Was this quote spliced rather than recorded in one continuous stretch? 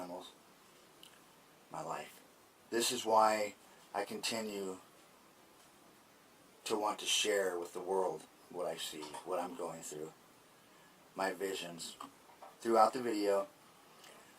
yes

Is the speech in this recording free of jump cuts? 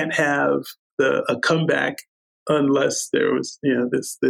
yes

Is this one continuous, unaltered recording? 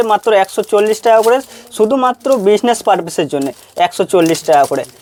yes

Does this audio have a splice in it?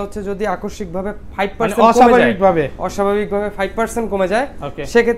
no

